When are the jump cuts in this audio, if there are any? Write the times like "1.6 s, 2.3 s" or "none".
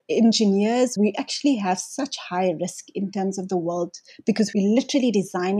0.9 s